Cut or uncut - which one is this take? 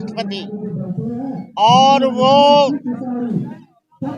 uncut